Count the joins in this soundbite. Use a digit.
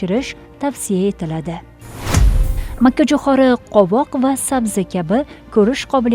1